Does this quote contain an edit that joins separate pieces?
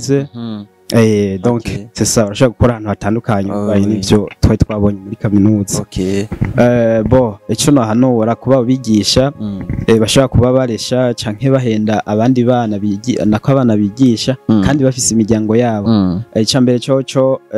yes; 1 cut; at 6.3 s

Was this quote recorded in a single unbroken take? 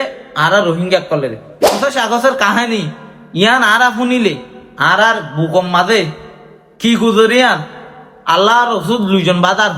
no; 1 cut; at 1.8 s

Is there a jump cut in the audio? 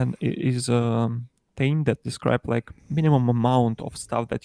no; 0 cuts

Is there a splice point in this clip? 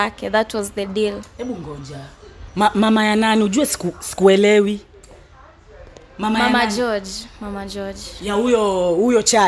no; 0 cuts

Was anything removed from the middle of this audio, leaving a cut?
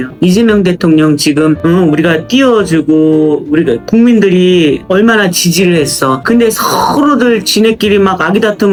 no; 0 cuts

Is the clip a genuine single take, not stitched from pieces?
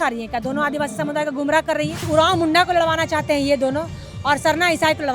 no; 1 cut; at 2.0 s

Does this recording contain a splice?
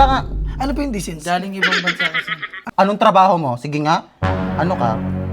yes; 1 cut; at 2.6 s

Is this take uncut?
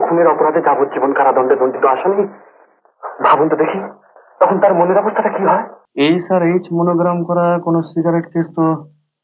no; 1 cut; at 5.8 s

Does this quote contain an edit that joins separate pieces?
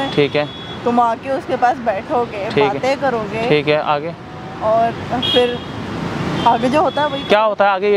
no; 0 cuts

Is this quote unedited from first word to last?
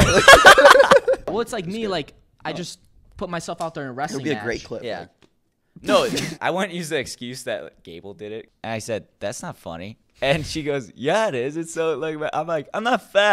no; 3 cuts; at 1.3 s, 6.3 s, 8.5 s

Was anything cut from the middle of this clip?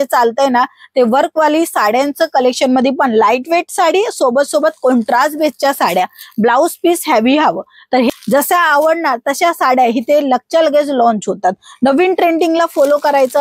yes; 1 cut; at 8.1 s

